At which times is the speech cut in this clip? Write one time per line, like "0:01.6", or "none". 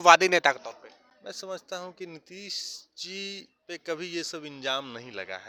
none